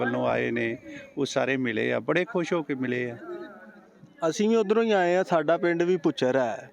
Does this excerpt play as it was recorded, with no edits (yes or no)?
yes